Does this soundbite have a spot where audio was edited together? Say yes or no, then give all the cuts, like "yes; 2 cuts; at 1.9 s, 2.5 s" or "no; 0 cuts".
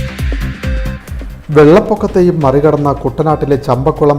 yes; 1 cut; at 1.0 s